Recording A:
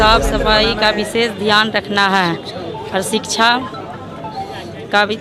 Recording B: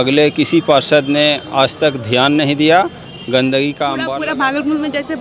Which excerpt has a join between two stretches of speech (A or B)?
B